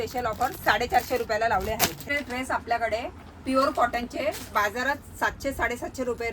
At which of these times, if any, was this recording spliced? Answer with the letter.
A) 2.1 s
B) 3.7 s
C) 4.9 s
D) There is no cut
A